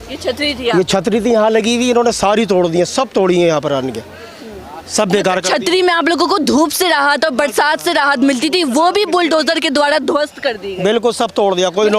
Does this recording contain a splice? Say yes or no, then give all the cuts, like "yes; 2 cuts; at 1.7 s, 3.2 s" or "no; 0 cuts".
no; 0 cuts